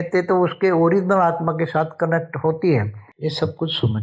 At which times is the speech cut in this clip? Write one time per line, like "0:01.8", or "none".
0:03.0